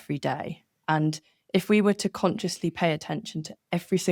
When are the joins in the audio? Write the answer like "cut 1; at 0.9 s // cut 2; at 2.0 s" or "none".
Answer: none